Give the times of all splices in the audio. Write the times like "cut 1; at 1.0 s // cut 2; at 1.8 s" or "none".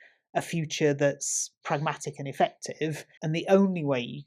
cut 1; at 1.6 s // cut 2; at 3.2 s